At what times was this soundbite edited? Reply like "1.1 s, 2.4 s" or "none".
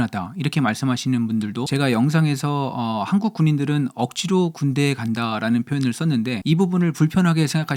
1.7 s, 6.4 s